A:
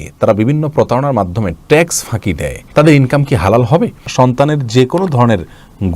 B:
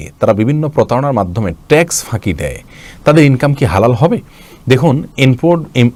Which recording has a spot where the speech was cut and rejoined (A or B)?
A